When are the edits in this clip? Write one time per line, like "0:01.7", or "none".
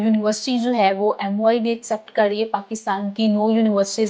none